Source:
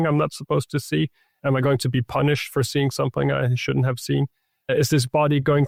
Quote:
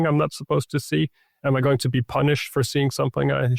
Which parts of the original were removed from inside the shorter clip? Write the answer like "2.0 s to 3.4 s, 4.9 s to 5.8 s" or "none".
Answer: none